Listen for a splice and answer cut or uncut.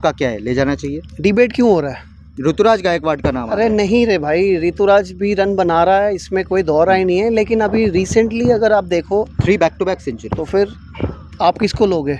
uncut